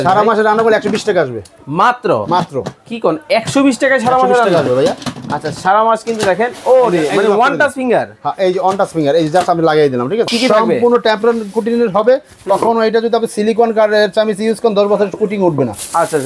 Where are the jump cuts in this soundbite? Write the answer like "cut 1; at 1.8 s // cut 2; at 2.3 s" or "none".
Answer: cut 1; at 10.3 s